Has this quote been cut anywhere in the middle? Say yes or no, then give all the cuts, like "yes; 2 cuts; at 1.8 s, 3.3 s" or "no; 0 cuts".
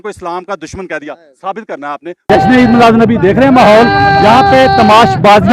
yes; 1 cut; at 2.3 s